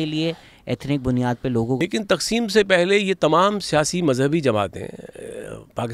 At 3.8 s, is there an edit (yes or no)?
no